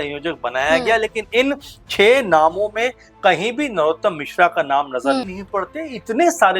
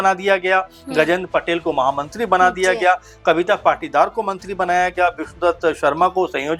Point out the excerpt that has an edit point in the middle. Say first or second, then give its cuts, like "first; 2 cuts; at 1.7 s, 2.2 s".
first; 1 cut; at 5.3 s